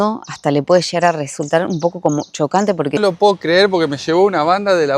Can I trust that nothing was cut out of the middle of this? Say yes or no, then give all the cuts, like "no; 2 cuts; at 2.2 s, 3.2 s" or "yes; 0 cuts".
no; 1 cut; at 3.0 s